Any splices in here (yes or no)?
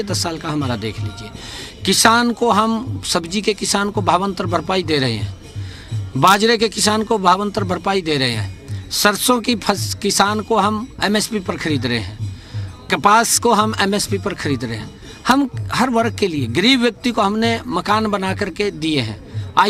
no